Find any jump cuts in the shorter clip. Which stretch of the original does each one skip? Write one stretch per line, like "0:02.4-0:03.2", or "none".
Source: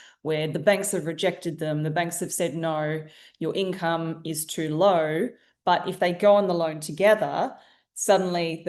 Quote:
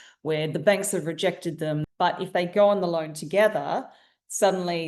0:01.8-0:05.5